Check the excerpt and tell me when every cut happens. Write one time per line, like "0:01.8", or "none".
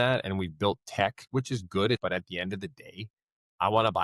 0:02.0